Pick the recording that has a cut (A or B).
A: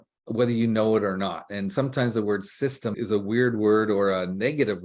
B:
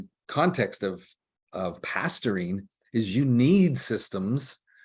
A